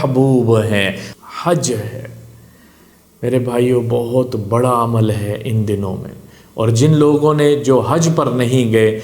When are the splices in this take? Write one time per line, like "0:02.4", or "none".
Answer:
0:01.0

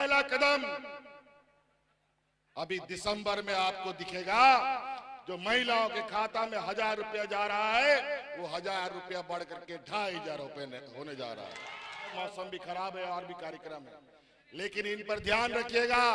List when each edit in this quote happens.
0:12.1

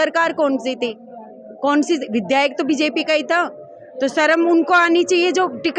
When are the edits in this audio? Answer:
none

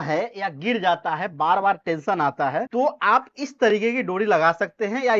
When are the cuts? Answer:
0:02.7

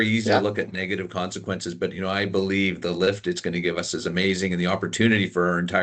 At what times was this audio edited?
none

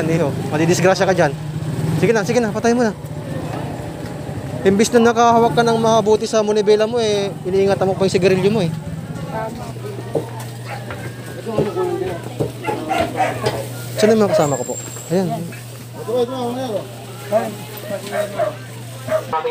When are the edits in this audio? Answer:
none

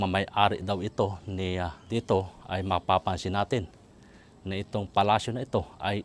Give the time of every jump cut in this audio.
0:01.8

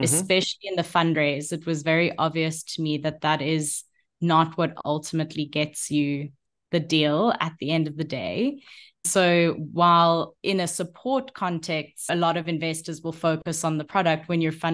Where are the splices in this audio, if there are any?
0:09.0
0:10.3
0:12.1

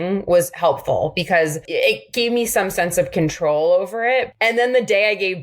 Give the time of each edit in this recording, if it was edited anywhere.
0:01.7
0:04.3

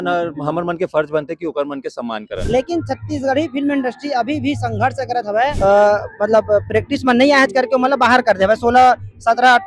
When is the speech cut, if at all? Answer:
0:02.3
0:05.5

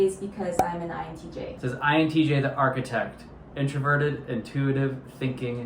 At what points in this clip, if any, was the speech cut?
0:01.5

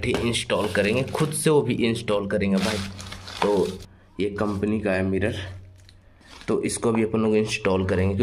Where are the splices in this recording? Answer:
none

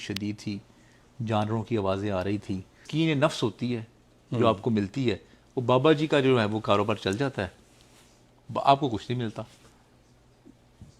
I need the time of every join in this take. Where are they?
0:02.9

